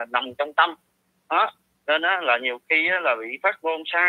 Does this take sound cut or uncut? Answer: cut